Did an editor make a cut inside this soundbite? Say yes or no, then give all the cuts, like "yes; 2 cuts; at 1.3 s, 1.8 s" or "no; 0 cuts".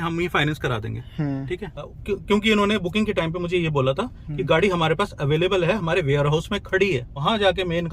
yes; 2 cuts; at 1.9 s, 7.2 s